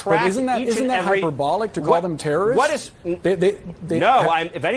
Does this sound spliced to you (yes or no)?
no